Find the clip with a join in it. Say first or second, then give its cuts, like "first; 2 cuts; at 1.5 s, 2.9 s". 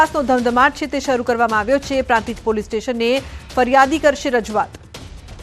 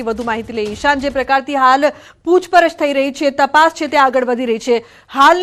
first; 1 cut; at 2.0 s